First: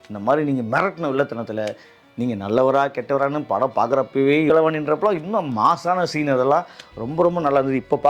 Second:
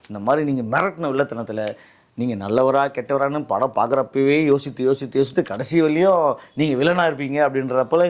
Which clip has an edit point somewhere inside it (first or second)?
first